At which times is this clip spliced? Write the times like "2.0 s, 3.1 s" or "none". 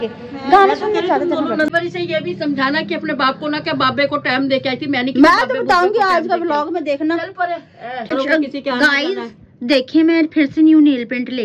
1.7 s, 5.6 s, 8.1 s